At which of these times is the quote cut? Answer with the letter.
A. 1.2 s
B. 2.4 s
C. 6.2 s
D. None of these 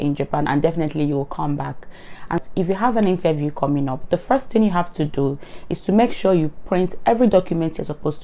B